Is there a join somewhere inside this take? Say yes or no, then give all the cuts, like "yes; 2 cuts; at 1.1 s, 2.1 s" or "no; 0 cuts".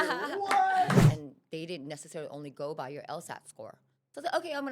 yes; 1 cut; at 1.1 s